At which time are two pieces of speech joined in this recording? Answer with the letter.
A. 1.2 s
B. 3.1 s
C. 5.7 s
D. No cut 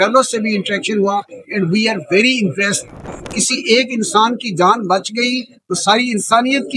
B